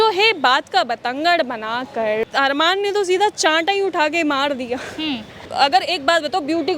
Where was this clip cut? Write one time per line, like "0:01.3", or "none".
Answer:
0:02.2
0:05.5